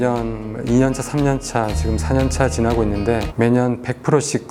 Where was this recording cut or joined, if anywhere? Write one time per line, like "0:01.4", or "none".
none